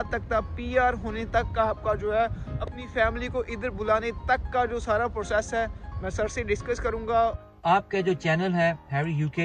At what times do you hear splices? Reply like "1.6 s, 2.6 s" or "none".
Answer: 7.4 s